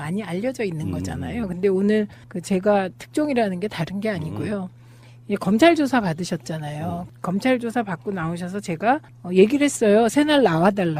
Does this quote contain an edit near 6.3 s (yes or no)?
yes